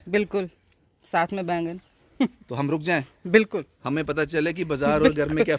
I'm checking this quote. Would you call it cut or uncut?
uncut